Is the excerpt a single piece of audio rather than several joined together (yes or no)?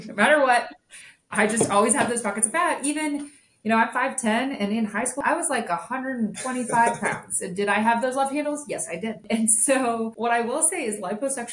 no